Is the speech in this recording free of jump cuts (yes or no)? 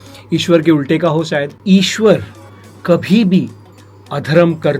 no